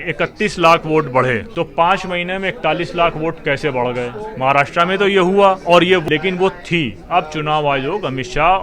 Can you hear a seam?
yes; 2 cuts; at 1.5 s, 6.0 s

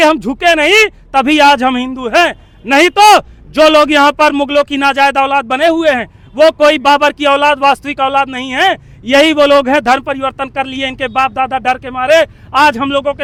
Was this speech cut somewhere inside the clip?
no; 0 cuts

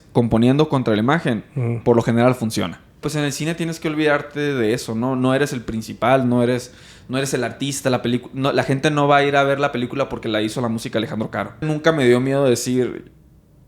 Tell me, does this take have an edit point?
yes; 2 cuts; at 3.1 s, 11.6 s

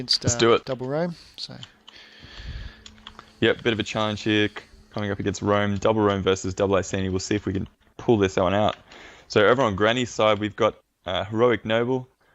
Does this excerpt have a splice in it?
yes; 1 cut; at 4.9 s

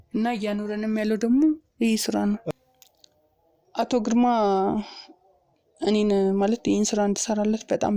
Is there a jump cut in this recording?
yes; 1 cut; at 2.6 s

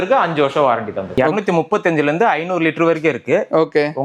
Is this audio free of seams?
no; 1 cut; at 1.0 s

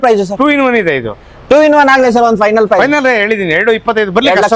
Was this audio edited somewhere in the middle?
no; 0 cuts

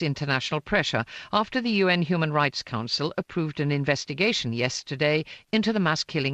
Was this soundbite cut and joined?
yes; 1 cut; at 4.4 s

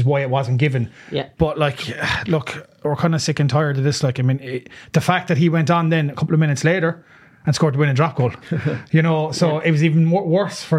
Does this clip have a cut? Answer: no; 0 cuts

